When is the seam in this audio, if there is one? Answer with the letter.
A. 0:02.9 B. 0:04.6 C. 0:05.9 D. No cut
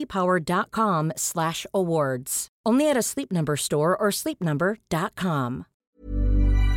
C